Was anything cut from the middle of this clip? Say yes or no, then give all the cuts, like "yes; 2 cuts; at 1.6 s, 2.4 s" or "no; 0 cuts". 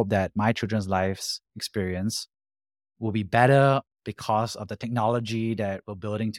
no; 0 cuts